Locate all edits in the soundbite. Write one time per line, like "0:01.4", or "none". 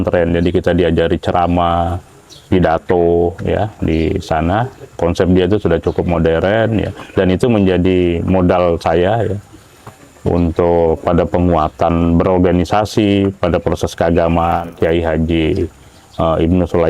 0:14.7